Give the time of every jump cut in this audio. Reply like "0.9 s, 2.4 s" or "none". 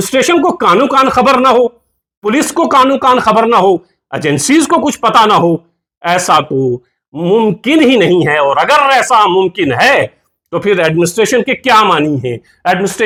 none